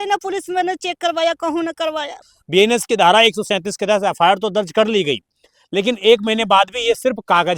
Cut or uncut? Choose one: cut